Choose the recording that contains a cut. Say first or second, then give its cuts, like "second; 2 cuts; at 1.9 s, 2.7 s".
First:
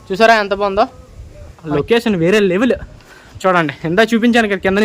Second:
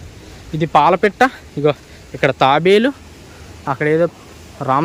first; 1 cut; at 1.7 s